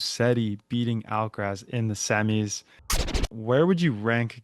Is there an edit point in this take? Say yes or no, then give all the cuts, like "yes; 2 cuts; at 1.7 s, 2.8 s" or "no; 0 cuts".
yes; 1 cut; at 3.1 s